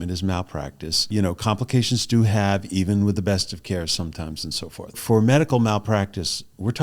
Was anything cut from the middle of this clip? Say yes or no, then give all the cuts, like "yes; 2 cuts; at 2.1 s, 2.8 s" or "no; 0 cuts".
yes; 2 cuts; at 1.1 s, 5.0 s